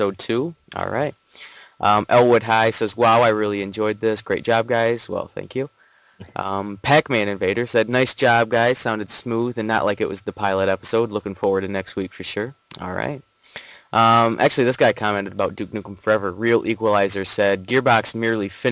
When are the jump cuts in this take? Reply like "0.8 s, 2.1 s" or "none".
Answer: 5.7 s